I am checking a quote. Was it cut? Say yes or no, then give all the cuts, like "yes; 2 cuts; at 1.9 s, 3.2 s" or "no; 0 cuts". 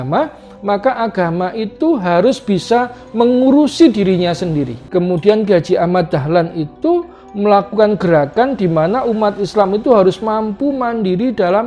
yes; 1 cut; at 4.8 s